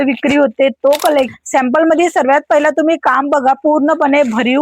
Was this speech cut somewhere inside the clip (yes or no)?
yes